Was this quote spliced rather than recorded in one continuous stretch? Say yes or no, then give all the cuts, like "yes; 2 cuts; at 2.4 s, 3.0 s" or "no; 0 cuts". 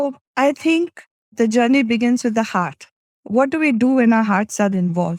no; 0 cuts